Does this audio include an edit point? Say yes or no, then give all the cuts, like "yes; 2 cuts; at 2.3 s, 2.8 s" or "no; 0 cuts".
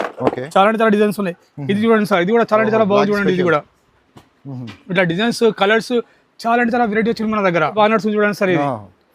yes; 1 cut; at 7.8 s